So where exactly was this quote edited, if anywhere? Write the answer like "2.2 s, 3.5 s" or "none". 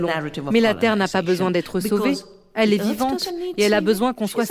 2.4 s

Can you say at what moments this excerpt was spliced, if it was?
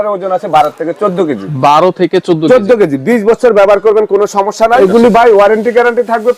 4.8 s

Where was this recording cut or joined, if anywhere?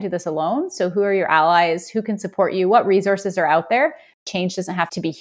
4.2 s

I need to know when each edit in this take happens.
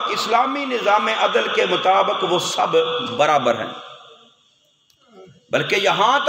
none

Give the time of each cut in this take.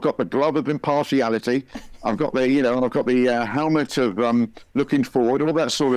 none

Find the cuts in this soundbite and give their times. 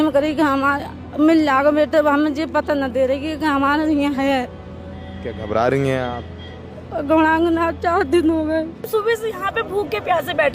8.9 s

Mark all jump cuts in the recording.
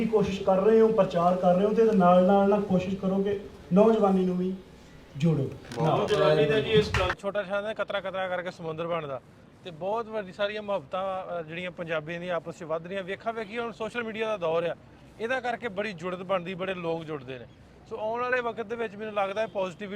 7.2 s

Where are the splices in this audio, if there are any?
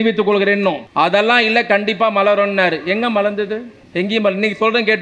0.8 s, 3.8 s

